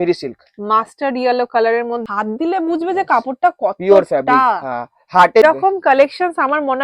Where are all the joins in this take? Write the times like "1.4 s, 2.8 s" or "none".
2.0 s, 5.4 s

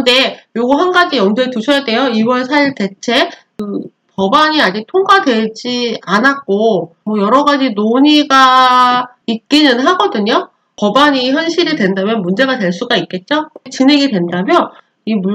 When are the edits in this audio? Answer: 13.7 s

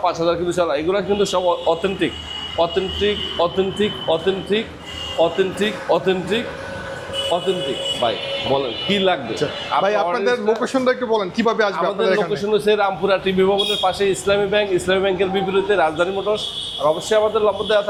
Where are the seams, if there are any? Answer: none

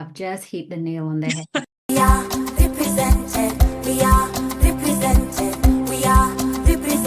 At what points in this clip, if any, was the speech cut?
1.8 s

